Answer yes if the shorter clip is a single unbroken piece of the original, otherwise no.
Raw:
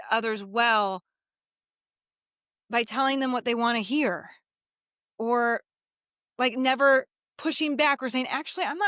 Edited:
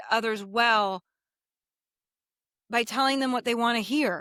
yes